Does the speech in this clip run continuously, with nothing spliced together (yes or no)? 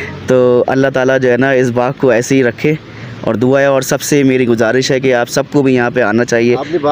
yes